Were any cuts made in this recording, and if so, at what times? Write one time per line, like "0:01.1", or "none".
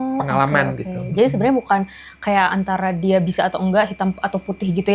none